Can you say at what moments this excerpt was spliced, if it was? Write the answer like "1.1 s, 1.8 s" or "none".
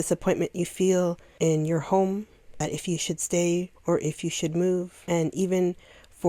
1.2 s, 2.6 s, 3.7 s, 5.0 s